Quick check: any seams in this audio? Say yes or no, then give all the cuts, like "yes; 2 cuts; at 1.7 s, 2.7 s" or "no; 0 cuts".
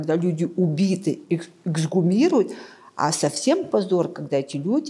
no; 0 cuts